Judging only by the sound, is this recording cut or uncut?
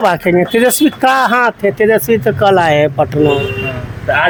uncut